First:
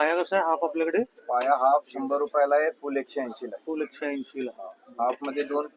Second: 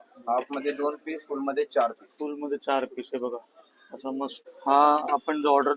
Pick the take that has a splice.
second; 1 cut; at 4.4 s

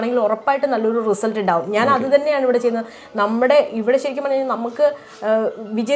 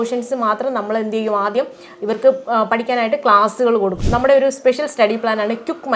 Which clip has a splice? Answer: second; 1 cut; at 4.0 s

